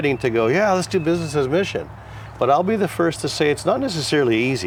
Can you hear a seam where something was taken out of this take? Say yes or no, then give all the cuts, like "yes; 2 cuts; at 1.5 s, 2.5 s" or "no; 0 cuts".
no; 0 cuts